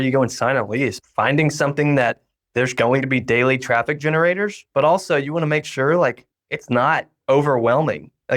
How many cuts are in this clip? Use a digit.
1